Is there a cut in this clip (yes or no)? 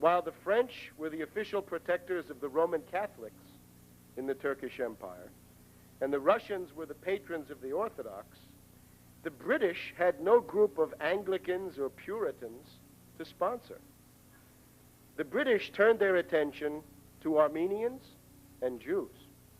yes